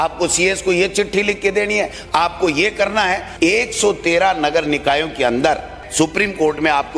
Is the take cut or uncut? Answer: cut